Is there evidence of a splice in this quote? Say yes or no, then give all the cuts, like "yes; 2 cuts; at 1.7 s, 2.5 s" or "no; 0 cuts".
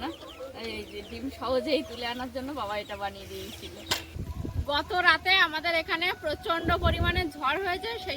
yes; 1 cut; at 4.1 s